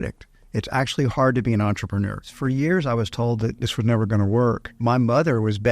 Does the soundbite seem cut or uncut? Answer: cut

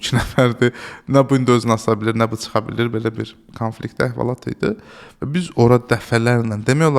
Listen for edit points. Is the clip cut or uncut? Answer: uncut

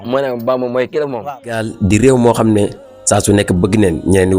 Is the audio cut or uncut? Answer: cut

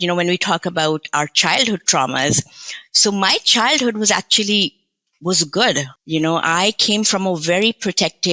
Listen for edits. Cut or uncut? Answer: cut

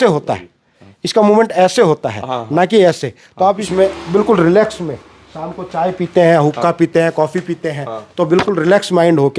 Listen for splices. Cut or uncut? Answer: cut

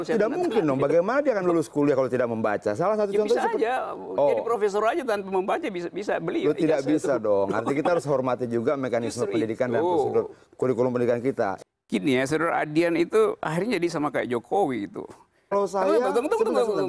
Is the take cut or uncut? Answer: cut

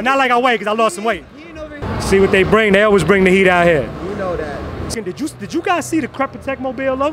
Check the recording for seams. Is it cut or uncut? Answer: cut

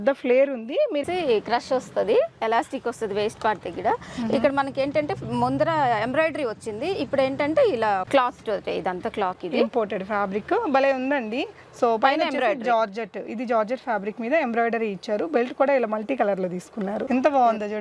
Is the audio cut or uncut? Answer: cut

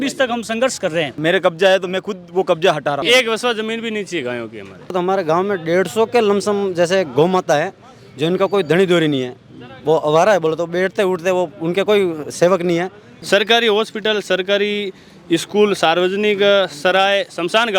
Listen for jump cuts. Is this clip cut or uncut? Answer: cut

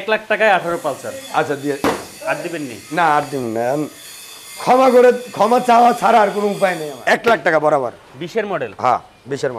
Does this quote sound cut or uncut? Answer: cut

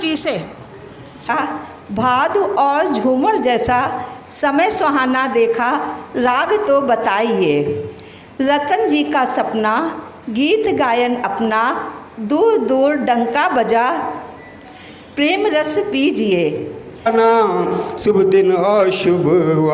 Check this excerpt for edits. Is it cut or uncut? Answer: cut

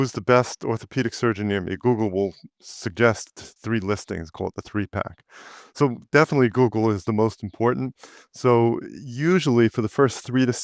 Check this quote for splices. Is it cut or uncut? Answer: uncut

